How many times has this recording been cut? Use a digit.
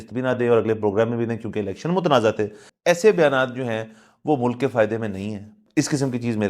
2